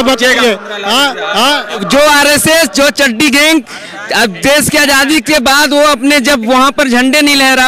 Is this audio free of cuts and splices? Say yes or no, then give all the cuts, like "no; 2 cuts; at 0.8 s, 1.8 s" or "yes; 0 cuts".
no; 1 cut; at 1.8 s